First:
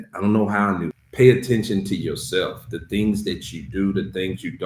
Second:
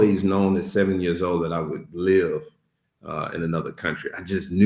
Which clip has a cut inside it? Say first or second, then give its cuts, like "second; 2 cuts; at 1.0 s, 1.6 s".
first; 1 cut; at 1.0 s